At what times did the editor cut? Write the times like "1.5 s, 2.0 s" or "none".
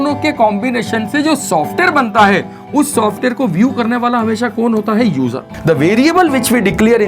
5.5 s